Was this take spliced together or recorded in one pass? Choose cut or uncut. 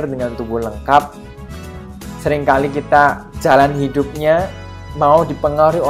uncut